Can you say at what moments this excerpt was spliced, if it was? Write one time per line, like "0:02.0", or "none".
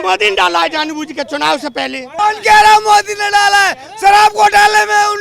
0:02.1